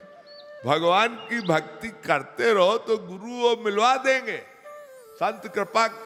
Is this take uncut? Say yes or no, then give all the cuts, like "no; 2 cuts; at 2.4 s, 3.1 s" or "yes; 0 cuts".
yes; 0 cuts